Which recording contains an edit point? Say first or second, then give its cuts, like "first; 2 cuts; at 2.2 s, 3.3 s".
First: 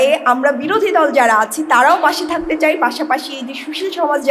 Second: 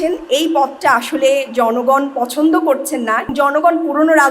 second; 1 cut; at 3.3 s